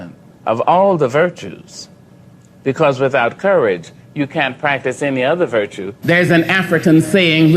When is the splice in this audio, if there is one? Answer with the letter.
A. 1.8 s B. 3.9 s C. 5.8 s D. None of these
C